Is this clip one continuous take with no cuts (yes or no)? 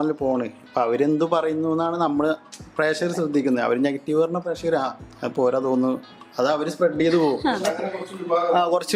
yes